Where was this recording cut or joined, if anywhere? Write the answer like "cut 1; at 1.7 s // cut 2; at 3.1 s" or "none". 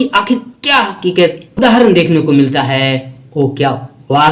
none

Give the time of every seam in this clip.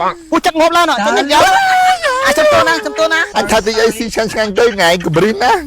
cut 1; at 3.2 s

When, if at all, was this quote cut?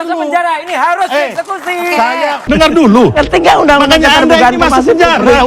cut 1; at 2.4 s

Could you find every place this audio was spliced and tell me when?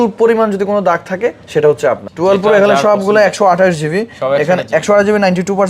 cut 1; at 2.1 s

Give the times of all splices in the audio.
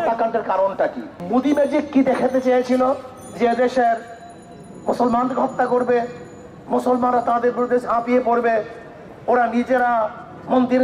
cut 1; at 1.1 s

